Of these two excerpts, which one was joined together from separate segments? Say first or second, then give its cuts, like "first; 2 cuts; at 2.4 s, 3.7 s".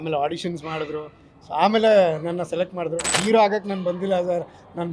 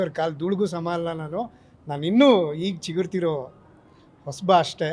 first; 1 cut; at 3.2 s